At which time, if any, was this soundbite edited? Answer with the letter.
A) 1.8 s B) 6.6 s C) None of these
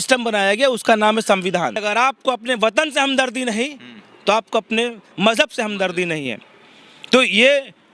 A